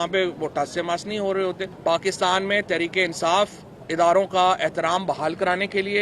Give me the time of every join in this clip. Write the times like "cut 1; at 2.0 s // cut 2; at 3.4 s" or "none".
cut 1; at 1.7 s